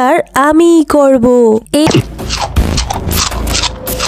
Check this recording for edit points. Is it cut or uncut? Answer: cut